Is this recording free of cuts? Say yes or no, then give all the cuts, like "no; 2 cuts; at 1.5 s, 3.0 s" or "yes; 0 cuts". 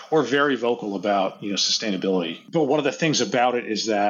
no; 1 cut; at 2.4 s